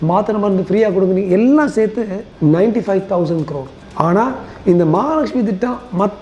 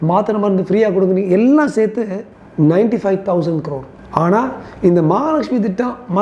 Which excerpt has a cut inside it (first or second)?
first